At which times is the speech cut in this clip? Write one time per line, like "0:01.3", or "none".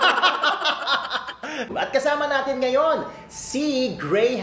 0:01.7